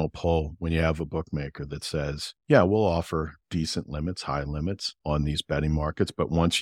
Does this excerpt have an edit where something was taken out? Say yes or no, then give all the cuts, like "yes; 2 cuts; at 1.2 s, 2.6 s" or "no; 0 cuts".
yes; 3 cuts; at 2.3 s, 3.4 s, 4.9 s